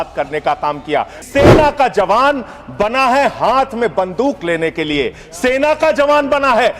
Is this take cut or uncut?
cut